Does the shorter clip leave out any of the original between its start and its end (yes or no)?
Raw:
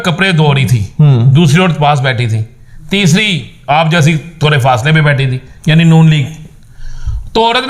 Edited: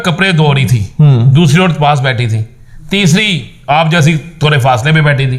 no